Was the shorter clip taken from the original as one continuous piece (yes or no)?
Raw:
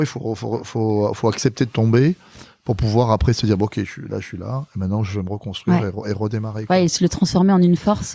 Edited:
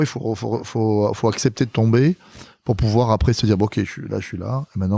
yes